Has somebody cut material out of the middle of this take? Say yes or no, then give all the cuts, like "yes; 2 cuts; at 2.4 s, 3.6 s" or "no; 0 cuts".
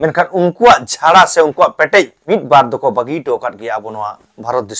yes; 1 cut; at 2.2 s